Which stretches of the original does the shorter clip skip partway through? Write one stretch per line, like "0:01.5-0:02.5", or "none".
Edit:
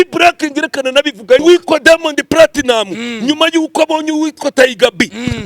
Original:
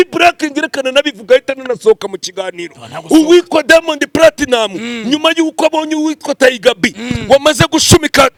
0:01.4-0:03.3